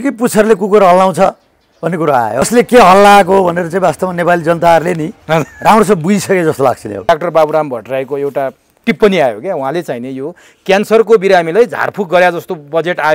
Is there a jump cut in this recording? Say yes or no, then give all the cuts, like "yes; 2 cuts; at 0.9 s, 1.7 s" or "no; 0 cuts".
yes; 2 cuts; at 2.5 s, 7.1 s